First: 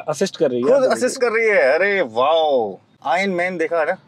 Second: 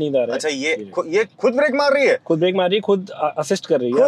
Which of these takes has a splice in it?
first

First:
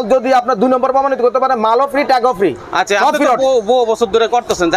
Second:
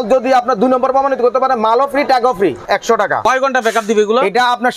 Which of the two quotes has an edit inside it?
second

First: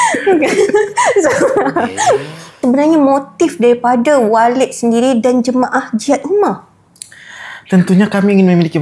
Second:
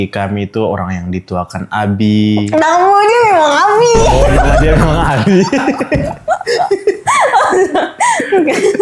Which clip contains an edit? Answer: first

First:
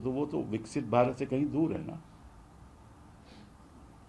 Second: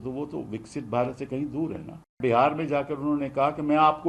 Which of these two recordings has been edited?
second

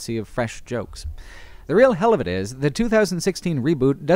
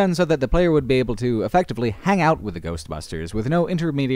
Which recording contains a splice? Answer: first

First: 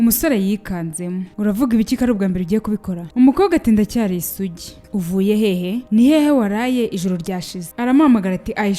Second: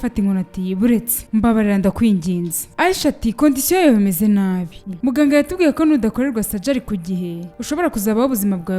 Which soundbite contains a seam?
first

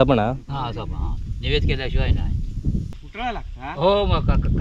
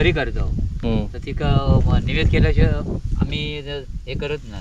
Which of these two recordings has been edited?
first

